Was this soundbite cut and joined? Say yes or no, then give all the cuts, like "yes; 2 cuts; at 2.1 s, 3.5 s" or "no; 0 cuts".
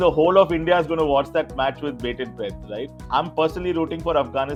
no; 0 cuts